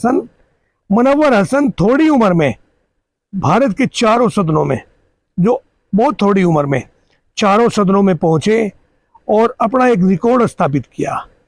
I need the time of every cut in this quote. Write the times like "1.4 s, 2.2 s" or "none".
none